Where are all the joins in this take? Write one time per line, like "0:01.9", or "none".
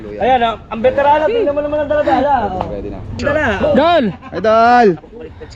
0:03.1